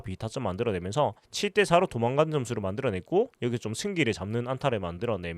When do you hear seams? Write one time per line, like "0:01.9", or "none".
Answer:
none